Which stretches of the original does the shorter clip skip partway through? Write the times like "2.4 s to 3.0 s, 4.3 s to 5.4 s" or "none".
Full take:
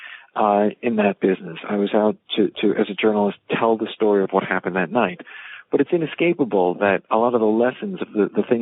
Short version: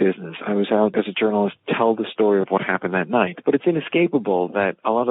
2.2 s to 2.8 s, 5.2 s to 5.6 s

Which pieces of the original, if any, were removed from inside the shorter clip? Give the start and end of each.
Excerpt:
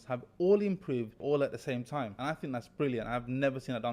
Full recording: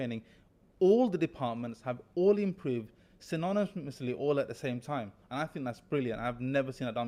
3.0 s to 4.2 s, 5.1 s to 5.3 s

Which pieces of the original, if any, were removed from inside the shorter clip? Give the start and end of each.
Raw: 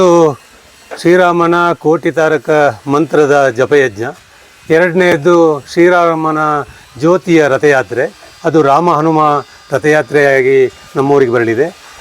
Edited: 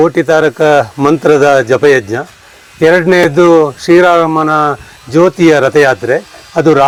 none

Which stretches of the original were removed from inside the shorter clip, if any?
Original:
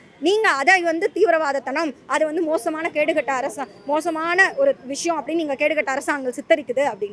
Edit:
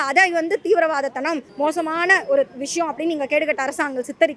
2.0 s to 3.8 s

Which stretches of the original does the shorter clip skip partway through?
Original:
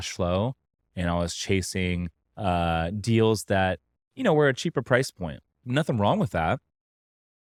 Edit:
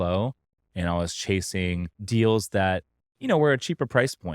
2.2 s to 3.0 s

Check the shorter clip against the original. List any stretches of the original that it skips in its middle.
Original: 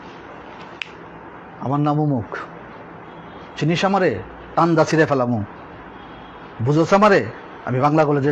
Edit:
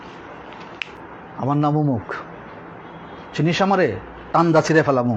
1.0 s to 1.2 s

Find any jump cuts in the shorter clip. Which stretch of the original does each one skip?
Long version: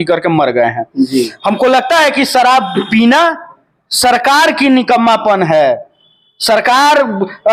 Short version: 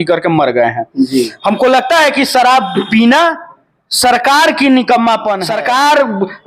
5.4 s to 6.4 s

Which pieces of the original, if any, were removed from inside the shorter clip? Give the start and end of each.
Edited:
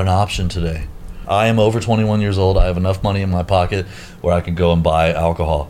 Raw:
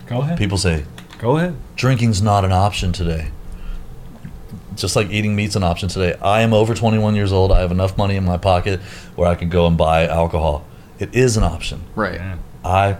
3.7 s to 6.2 s

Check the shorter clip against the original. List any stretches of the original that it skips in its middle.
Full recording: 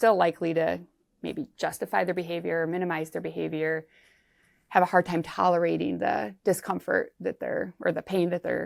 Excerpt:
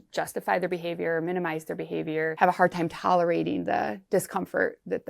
3.8 s to 4.7 s

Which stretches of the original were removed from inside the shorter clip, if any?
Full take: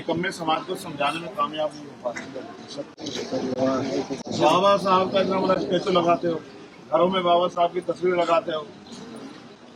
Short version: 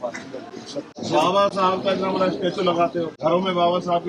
2.9 s to 4.2 s, 6.4 s to 6.8 s

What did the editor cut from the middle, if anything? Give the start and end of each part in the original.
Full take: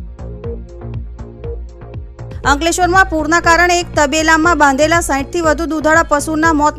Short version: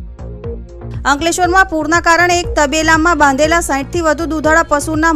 1.0 s to 2.4 s

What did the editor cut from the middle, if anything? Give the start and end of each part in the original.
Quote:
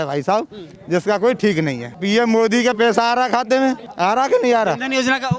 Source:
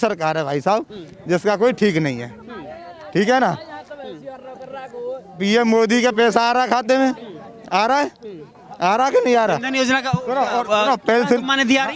2.3 s to 5.3 s, 7.2 s to 8.7 s

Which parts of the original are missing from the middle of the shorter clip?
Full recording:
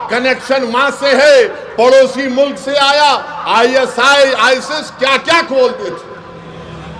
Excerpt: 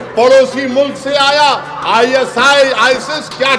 none

